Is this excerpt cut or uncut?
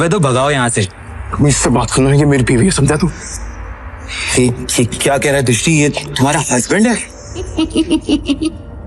cut